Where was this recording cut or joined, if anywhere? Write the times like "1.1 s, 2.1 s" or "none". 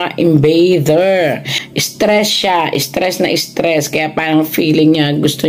1.6 s